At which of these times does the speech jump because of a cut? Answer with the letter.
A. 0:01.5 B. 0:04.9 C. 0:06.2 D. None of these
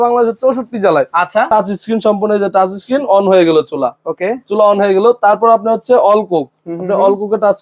A